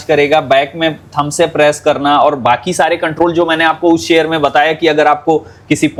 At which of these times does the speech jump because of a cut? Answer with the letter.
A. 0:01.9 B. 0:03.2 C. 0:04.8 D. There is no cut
D